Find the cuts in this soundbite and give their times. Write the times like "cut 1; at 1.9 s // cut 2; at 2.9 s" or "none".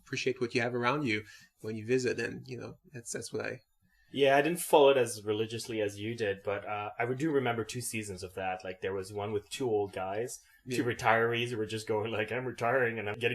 none